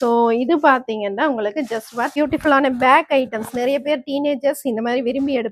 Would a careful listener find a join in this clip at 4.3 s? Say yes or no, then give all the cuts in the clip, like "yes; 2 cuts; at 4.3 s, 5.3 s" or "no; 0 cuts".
no; 1 cut; at 2.2 s